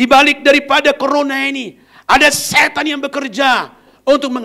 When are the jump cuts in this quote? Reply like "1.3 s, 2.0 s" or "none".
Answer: none

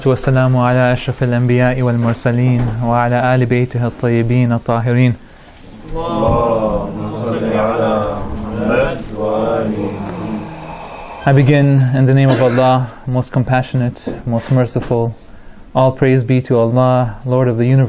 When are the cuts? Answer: none

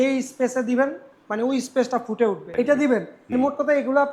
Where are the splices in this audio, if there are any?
2.4 s, 3.2 s

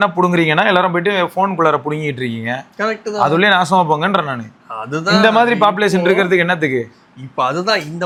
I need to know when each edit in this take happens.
none

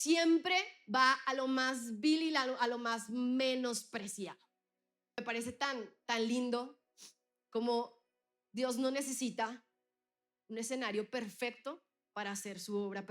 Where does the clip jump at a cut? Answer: 5.2 s

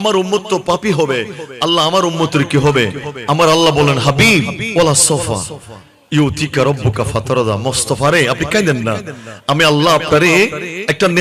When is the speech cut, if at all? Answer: 4.6 s

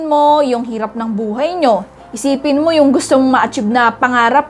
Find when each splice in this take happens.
none

